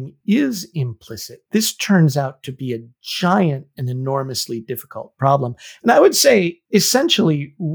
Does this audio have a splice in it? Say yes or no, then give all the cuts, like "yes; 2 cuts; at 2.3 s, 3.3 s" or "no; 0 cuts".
no; 0 cuts